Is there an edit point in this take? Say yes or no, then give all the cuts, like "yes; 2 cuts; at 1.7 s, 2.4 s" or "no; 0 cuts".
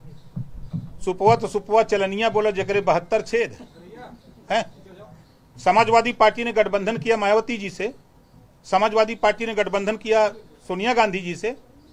no; 0 cuts